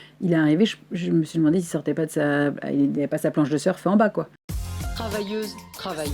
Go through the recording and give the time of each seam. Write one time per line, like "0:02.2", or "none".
0:04.3